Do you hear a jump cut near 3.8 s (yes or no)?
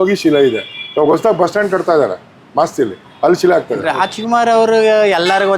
yes